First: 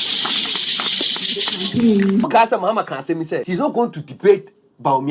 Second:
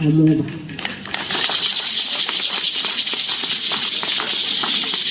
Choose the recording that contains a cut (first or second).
first